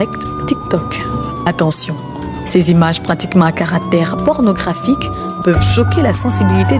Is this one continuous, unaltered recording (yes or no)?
yes